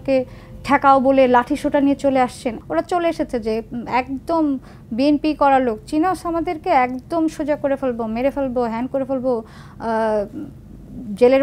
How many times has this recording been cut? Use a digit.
1